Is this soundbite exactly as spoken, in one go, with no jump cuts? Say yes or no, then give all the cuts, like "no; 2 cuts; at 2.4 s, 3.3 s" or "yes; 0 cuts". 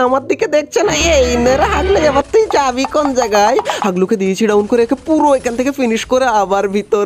yes; 0 cuts